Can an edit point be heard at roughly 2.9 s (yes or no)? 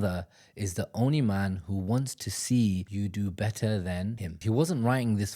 yes